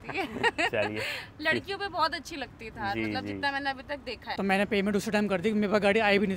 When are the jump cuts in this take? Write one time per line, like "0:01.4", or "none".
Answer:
0:04.2